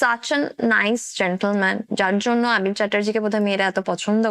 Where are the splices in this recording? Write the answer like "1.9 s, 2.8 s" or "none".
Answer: none